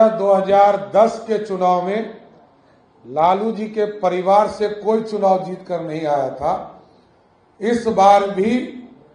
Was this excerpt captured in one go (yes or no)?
yes